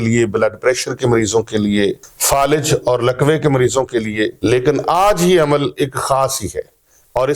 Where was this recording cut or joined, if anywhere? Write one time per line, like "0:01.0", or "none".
0:02.1
0:04.3